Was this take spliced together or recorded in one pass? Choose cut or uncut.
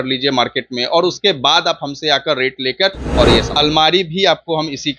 cut